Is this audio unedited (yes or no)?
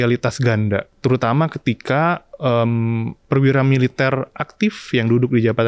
no